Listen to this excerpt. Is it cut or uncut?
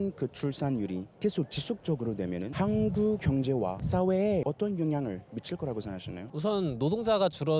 cut